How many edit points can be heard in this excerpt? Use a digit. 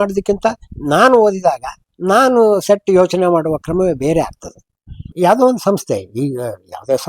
1